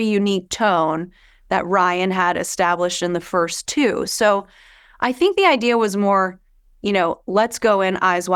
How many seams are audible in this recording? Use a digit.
0